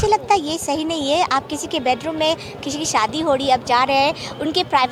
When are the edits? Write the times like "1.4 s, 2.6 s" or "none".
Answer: none